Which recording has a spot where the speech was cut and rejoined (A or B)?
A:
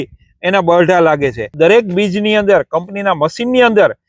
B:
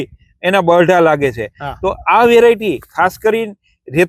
A